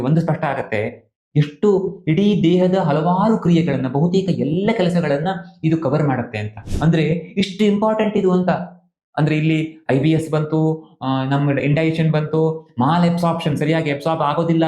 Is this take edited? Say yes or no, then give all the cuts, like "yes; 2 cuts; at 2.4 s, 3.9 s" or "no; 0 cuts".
yes; 1 cut; at 6.6 s